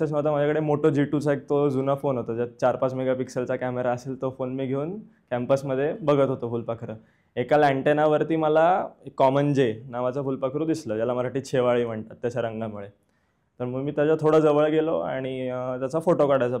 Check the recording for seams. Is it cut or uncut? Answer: uncut